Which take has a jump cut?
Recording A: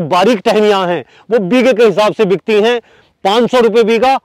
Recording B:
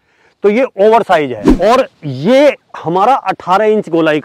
B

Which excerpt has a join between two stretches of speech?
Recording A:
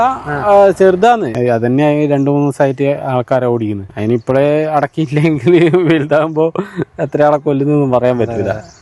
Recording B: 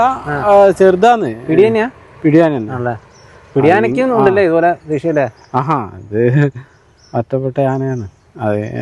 A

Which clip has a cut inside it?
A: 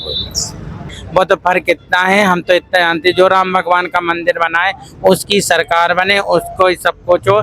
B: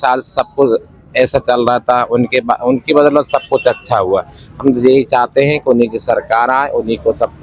A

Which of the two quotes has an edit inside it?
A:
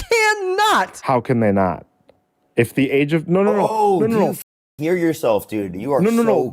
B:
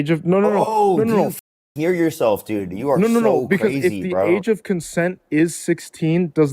A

